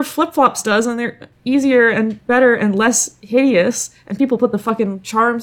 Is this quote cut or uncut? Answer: uncut